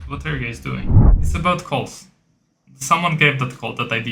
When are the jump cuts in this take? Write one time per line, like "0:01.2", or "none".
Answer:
0:01.0